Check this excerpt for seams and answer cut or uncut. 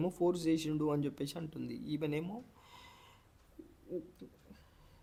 uncut